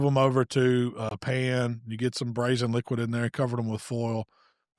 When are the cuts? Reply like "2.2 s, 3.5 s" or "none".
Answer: 1.1 s